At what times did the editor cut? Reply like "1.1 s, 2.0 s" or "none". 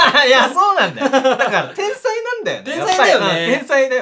none